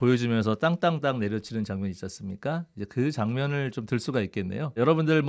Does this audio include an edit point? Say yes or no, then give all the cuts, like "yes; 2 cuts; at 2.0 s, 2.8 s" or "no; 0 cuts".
no; 0 cuts